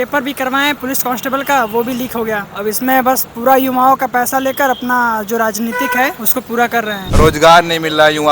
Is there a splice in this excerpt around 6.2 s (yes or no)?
yes